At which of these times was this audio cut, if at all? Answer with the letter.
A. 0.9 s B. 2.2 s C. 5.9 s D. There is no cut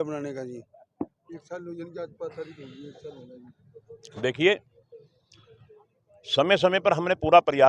D